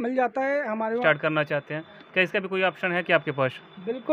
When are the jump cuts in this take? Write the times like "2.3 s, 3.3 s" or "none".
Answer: 1.0 s